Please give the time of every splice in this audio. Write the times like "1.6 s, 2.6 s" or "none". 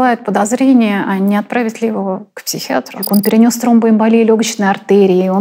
3.0 s